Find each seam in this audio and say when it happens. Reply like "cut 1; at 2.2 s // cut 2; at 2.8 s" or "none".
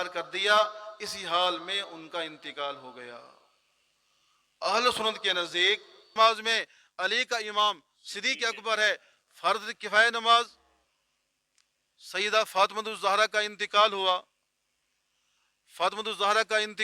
cut 1; at 6.1 s